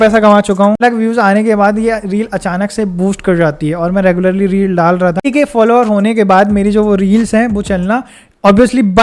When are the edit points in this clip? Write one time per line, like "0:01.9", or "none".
0:00.8
0:05.2